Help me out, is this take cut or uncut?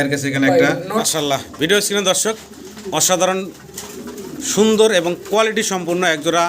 cut